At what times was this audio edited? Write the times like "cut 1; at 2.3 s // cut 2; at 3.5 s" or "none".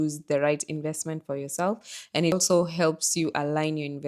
cut 1; at 2.3 s